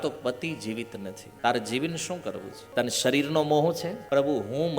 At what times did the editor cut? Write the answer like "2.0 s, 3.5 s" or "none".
1.2 s, 2.5 s, 4.0 s